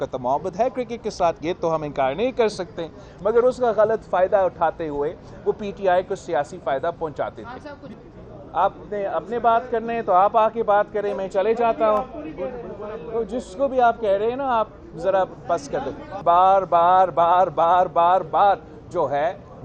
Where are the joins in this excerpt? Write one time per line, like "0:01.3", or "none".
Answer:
0:07.9
0:16.1